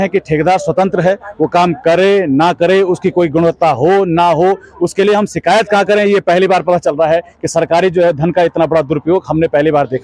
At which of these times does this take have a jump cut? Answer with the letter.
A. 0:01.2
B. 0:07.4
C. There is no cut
C